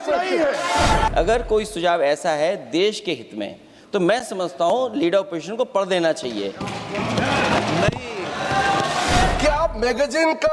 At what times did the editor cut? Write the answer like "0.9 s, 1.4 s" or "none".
1.1 s, 9.3 s